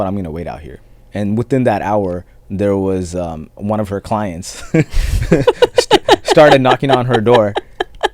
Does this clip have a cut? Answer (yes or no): yes